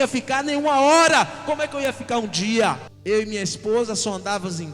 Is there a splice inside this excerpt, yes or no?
yes